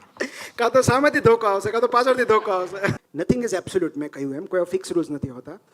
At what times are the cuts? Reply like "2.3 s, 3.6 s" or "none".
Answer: 2.9 s